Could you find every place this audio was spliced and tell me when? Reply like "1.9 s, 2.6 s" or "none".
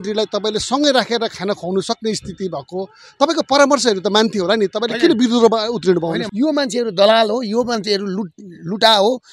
6.2 s